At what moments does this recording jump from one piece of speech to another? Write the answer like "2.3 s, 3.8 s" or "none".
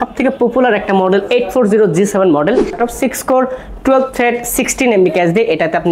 2.7 s